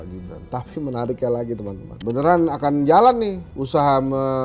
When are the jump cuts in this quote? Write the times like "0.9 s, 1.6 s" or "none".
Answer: 2.0 s

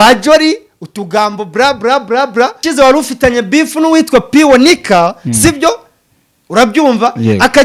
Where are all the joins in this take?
2.6 s

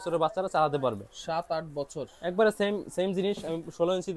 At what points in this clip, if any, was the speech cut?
none

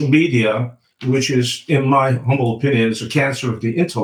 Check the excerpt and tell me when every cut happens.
none

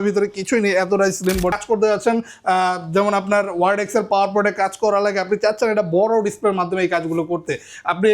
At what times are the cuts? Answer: 1.5 s

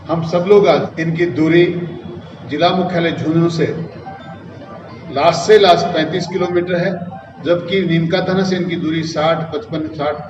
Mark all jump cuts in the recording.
0.9 s

